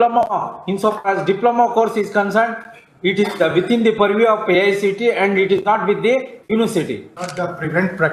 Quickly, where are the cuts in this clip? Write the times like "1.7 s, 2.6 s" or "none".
7.2 s